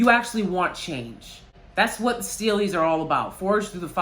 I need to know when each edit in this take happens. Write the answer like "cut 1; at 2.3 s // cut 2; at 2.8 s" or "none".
cut 1; at 1.6 s

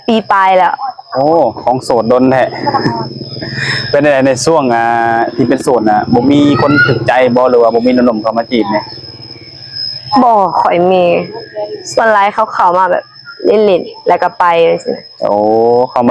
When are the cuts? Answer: none

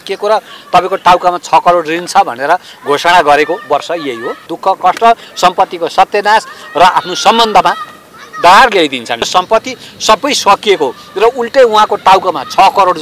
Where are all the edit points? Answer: cut 1; at 4.5 s // cut 2; at 9.3 s

